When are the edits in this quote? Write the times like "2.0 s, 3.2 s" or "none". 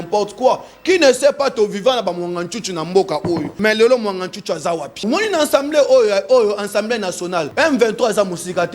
3.5 s, 5.0 s, 7.5 s